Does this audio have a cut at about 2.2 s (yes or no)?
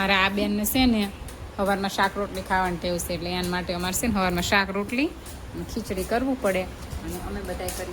no